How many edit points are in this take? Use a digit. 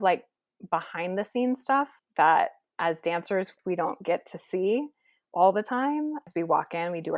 2